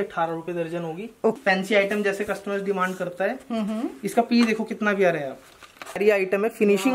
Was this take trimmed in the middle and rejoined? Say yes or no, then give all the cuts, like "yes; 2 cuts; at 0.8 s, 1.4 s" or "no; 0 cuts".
yes; 2 cuts; at 1.4 s, 6.0 s